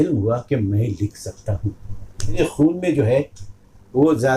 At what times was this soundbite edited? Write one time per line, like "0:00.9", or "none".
0:02.4